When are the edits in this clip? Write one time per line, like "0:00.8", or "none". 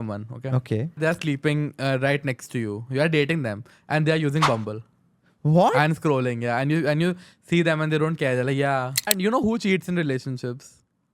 0:01.0
0:09.1